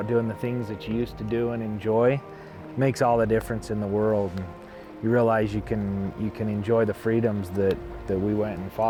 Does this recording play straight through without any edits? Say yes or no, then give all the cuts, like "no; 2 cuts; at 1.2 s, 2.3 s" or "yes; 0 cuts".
yes; 0 cuts